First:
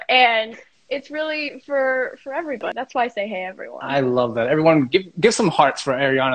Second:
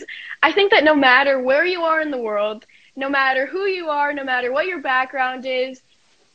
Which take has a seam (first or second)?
first